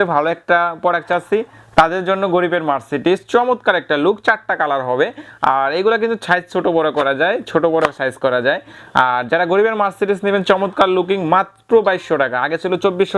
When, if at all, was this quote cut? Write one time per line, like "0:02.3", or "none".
none